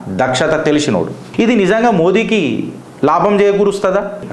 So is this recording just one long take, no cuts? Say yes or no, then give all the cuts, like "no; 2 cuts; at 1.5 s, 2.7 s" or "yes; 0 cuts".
no; 1 cut; at 1.3 s